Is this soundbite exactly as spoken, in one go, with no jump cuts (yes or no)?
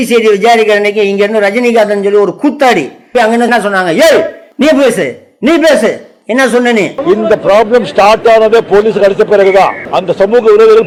yes